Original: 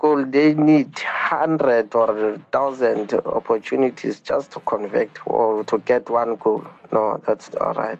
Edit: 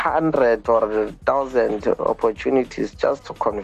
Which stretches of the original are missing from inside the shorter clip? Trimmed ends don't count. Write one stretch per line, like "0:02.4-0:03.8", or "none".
none